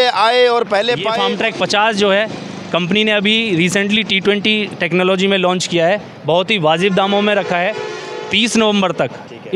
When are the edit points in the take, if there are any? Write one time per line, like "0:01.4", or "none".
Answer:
0:01.1